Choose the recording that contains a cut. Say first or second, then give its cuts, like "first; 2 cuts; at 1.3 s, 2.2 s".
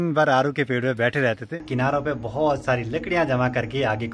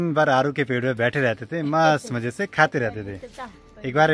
first; 1 cut; at 1.6 s